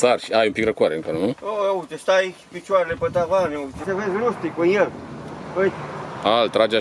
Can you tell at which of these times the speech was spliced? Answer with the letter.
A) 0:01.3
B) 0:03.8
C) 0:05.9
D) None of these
B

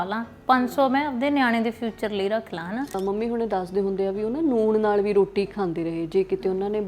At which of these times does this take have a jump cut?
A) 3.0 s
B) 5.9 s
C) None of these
A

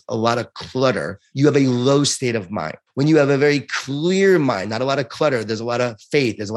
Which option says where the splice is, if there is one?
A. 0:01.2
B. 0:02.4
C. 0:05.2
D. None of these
A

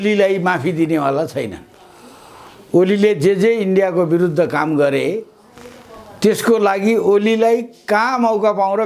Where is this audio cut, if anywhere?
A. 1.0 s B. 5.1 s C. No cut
C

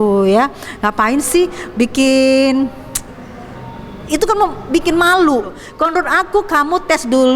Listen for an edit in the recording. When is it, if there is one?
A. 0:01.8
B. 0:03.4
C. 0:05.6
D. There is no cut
C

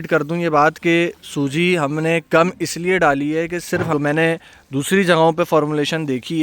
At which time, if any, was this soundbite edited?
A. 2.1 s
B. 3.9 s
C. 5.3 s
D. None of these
B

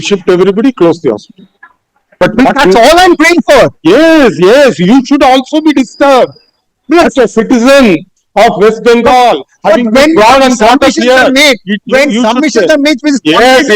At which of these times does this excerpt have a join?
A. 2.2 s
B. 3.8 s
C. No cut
A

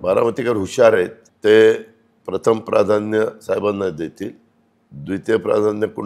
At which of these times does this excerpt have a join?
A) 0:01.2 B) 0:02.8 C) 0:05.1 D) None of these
A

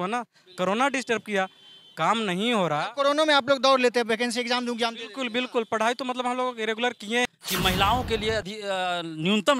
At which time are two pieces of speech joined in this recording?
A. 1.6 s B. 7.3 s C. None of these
B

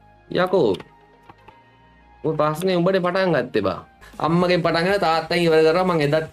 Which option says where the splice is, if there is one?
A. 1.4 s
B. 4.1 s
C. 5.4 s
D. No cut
B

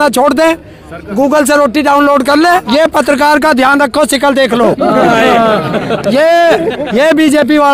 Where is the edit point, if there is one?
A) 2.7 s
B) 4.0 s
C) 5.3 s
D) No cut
A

